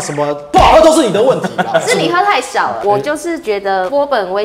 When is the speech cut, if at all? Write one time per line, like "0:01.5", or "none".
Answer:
0:02.8